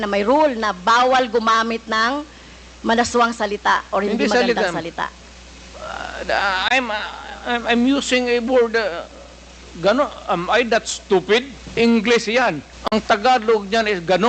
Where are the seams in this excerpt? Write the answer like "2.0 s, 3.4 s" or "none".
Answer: 11.6 s, 12.7 s

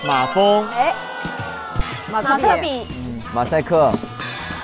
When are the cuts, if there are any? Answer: none

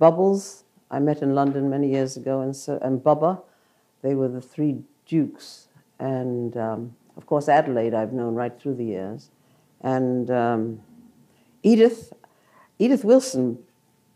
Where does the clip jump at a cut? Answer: 4.4 s

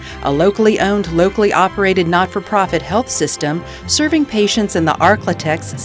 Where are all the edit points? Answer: none

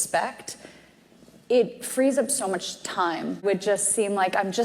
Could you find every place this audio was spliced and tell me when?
3.4 s

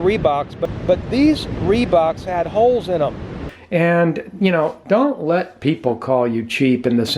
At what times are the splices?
3.4 s

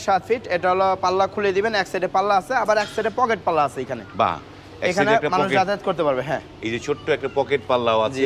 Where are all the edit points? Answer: none

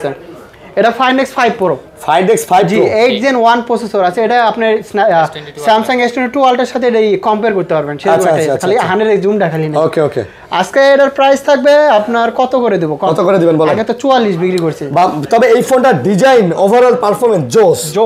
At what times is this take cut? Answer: none

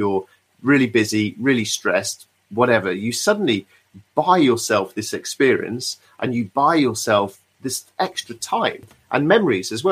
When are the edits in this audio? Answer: 8.9 s

